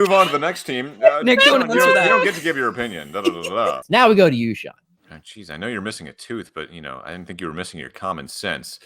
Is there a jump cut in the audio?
yes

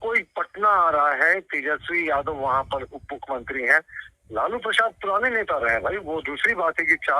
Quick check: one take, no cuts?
yes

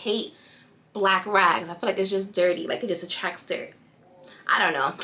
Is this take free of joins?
yes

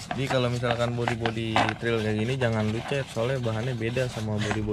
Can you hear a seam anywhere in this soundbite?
no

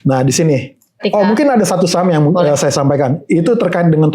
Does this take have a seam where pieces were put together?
yes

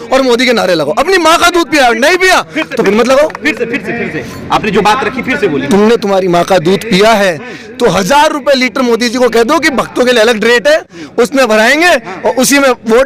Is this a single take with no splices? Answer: yes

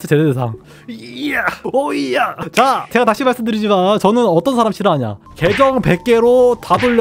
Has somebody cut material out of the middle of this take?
yes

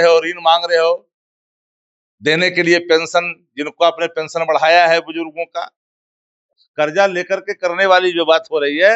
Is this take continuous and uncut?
no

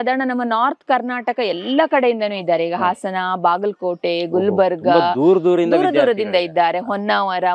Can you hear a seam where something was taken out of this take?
no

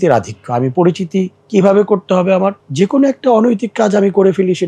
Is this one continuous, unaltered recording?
no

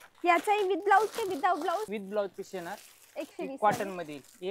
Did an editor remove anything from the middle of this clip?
yes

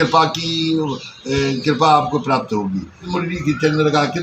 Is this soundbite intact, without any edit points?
no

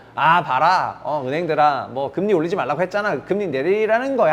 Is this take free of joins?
yes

